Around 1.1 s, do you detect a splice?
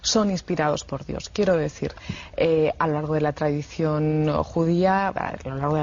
yes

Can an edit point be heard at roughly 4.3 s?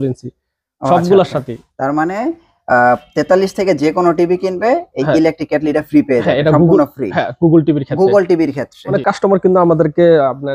no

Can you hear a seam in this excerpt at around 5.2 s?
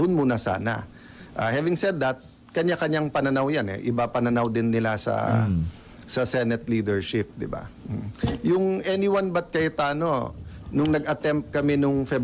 no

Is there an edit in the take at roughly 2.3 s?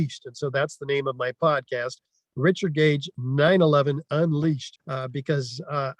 no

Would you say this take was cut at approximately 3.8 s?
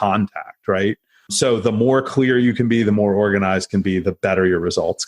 no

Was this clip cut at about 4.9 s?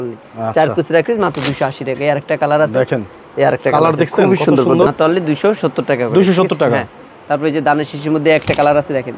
yes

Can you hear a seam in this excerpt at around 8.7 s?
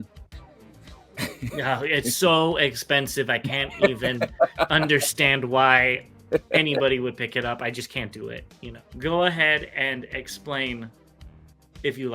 yes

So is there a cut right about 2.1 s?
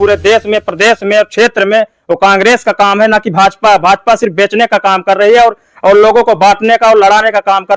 no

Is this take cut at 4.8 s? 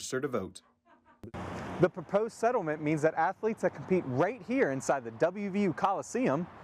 no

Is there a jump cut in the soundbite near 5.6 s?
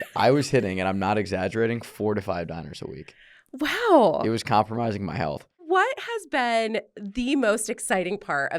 yes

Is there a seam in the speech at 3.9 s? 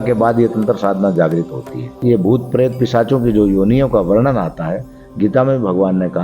no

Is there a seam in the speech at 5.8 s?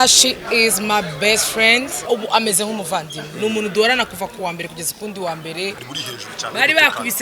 yes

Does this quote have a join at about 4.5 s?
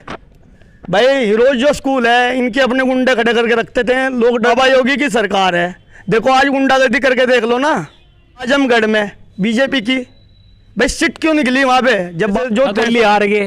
yes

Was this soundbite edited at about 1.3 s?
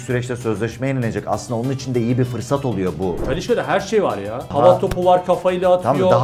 no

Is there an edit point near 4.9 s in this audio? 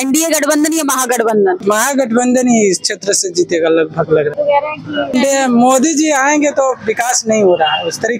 yes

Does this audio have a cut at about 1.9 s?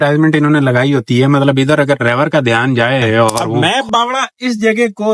no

